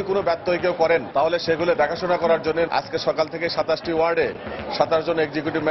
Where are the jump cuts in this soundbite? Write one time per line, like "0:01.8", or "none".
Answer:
0:01.1
0:02.7